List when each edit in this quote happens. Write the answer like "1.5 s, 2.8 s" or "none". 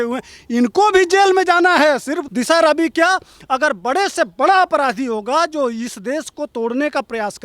2.2 s